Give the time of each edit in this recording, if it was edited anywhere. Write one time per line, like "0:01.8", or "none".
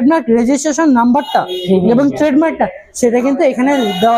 none